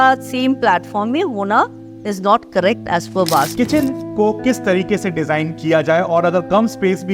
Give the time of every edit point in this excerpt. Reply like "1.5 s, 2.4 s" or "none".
3.5 s